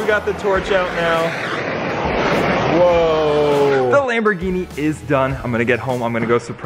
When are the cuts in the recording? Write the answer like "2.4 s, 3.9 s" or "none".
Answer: none

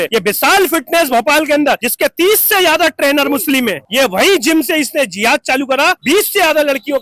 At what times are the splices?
3.8 s, 6.0 s

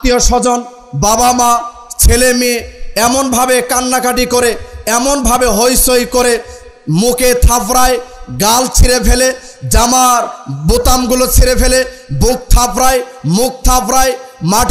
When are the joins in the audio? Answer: none

